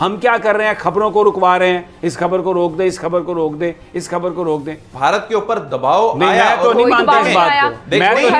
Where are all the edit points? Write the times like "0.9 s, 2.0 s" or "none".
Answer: 4.8 s